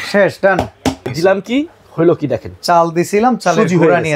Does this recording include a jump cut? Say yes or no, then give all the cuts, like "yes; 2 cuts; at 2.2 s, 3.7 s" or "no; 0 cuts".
yes; 1 cut; at 1.1 s